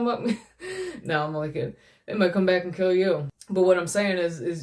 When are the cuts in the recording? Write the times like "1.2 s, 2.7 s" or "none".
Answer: 3.4 s